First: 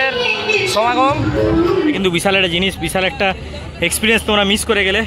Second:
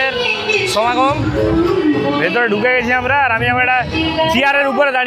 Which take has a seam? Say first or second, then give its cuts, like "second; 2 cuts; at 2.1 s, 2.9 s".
first; 1 cut; at 2.0 s